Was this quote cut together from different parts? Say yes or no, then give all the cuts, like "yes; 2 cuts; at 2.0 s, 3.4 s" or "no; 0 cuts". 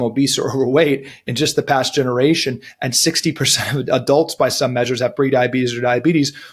no; 0 cuts